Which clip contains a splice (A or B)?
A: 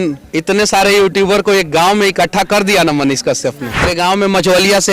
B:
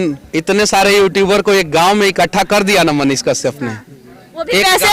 A